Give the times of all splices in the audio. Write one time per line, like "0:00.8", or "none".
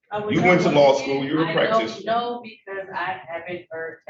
none